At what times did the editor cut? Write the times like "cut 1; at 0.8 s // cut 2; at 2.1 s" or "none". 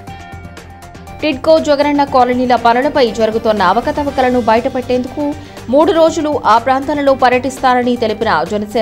cut 1; at 1.2 s

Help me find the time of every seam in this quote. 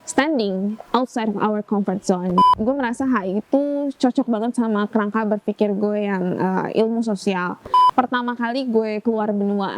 cut 1; at 2.4 s // cut 2; at 7.9 s

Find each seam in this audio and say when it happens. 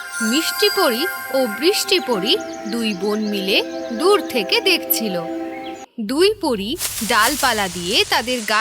cut 1; at 5.8 s

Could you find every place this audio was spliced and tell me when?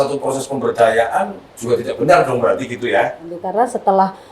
cut 1; at 3.4 s

